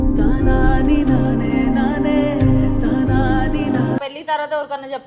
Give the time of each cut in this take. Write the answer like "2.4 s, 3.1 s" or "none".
none

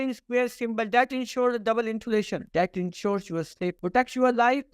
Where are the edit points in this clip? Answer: 2.4 s, 3.8 s

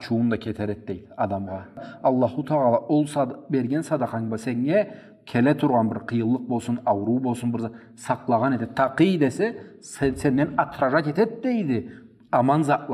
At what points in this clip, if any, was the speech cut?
1.9 s

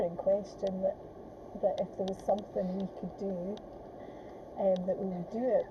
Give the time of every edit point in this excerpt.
none

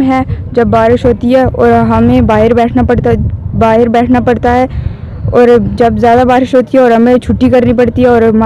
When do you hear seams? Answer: none

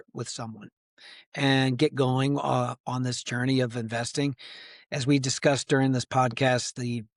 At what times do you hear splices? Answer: none

